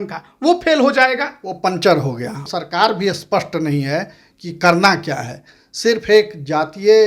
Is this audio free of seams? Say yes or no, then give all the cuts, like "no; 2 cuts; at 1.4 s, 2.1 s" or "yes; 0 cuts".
no; 1 cut; at 2.4 s